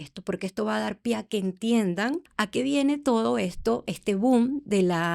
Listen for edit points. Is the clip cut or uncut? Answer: cut